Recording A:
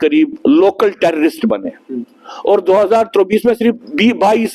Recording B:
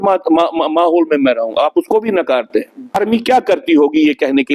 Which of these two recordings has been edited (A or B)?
B